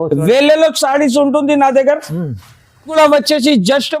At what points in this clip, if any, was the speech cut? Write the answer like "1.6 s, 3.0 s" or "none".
2.9 s

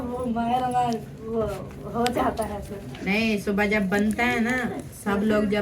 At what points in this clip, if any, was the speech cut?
3.0 s

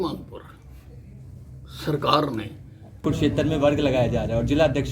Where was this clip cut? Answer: 3.0 s

